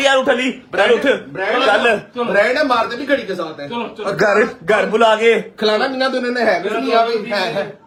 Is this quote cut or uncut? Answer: uncut